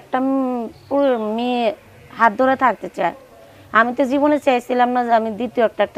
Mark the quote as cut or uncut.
uncut